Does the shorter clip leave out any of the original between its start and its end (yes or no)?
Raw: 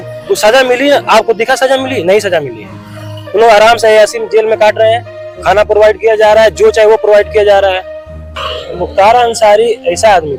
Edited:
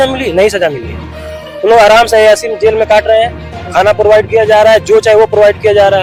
no